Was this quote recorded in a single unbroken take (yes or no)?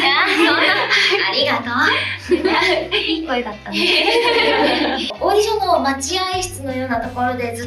no